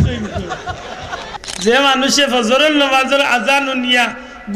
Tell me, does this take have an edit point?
yes; 1 cut; at 1.3 s

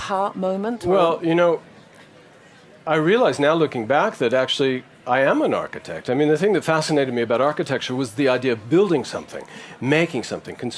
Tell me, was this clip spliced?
yes; 1 cut; at 5.8 s

